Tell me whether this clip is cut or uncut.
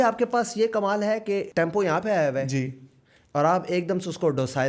cut